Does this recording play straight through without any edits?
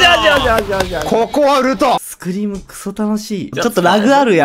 no; 2 cuts; at 2.1 s, 3.5 s

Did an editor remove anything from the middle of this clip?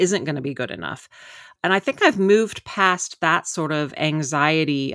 no; 0 cuts

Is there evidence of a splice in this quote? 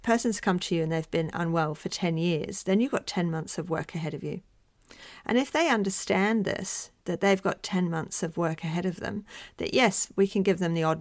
no; 0 cuts

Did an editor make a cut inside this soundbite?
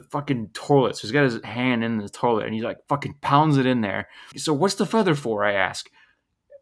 yes; 1 cut; at 4.3 s

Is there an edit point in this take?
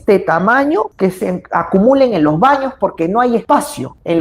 yes; 2 cuts; at 0.9 s, 3.4 s

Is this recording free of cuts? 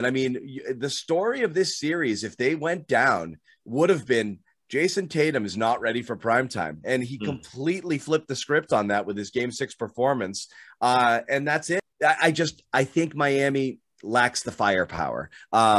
no; 1 cut; at 11.9 s

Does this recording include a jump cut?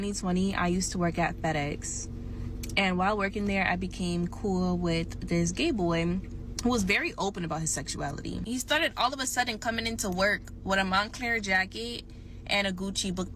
yes; 1 cut; at 8.4 s

